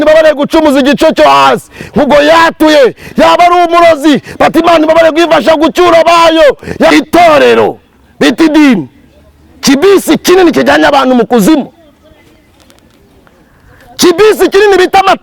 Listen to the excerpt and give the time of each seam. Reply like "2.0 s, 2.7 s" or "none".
6.9 s